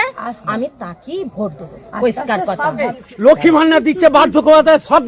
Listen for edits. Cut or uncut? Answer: cut